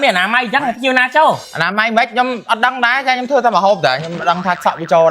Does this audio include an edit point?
yes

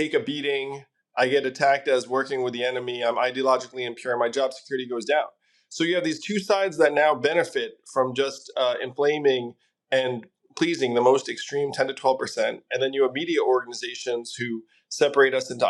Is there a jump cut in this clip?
no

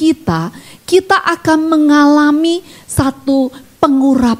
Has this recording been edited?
no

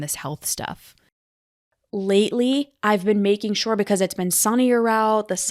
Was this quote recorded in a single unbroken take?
no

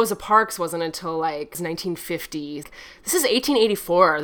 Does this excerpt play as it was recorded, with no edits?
no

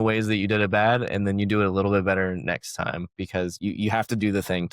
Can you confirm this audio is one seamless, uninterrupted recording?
no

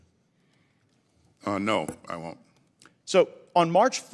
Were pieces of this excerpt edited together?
no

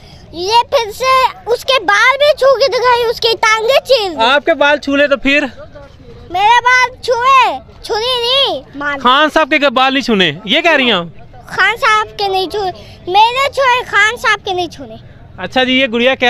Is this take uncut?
yes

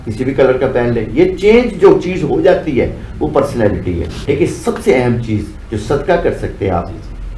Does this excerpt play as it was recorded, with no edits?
no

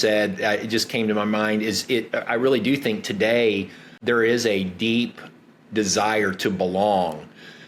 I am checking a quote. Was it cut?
yes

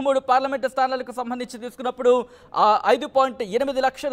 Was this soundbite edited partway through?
no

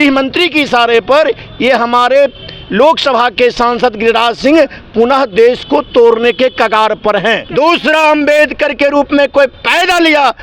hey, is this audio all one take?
no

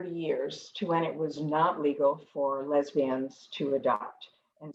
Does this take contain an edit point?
no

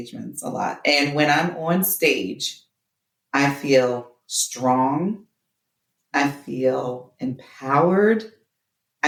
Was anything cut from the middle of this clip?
no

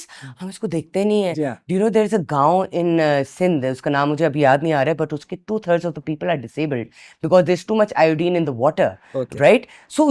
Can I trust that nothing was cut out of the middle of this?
yes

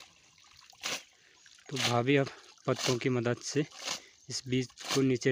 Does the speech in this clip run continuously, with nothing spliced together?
yes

